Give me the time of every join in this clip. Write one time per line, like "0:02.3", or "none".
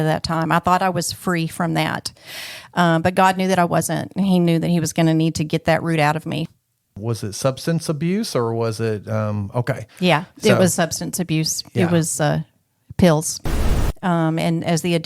0:06.5
0:13.8

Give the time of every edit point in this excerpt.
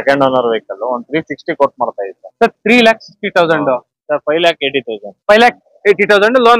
0:03.9

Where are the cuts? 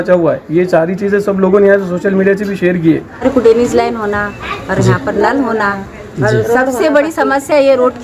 0:03.1

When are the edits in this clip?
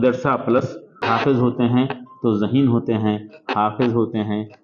0:01.0

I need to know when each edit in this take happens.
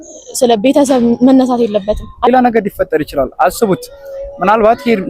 0:02.3

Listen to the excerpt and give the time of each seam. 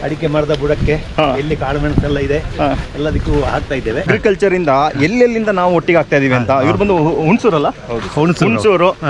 0:04.1

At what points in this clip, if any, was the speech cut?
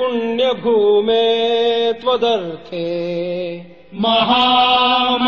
none

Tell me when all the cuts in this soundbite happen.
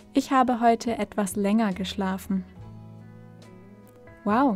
none

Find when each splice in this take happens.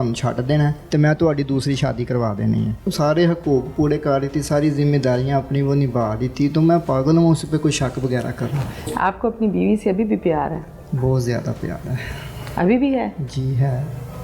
0:00.8
0:02.9
0:08.9

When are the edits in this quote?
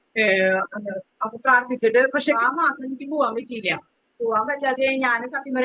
0:02.4

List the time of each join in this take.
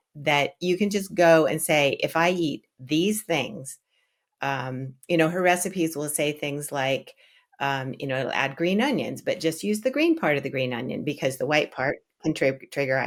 none

